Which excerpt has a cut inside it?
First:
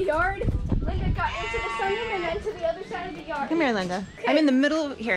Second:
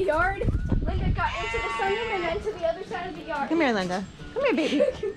first; 1 cut; at 4.2 s

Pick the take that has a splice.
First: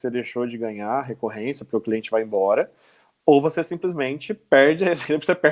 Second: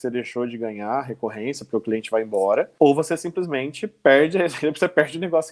second; 1 cut; at 2.7 s

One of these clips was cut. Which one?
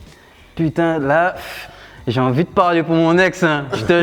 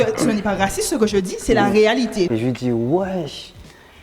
second; 1 cut; at 2.3 s

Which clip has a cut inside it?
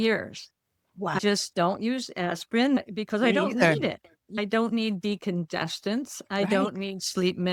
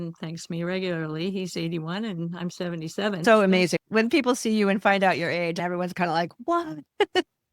second; 2 cuts; at 3.2 s, 5.6 s

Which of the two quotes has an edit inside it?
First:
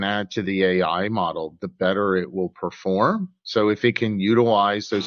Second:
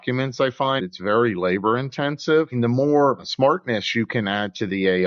second; 3 cuts; at 0.8 s, 2.5 s, 3.3 s

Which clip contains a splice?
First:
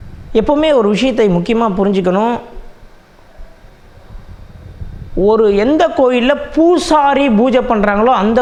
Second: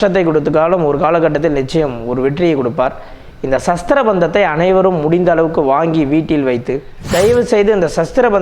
second; 1 cut; at 6.9 s

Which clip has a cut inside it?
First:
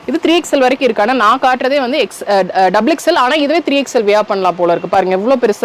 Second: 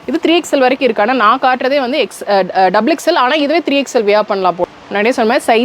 second; 1 cut; at 4.6 s

